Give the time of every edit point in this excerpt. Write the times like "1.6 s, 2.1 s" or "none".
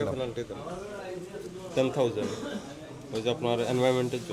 none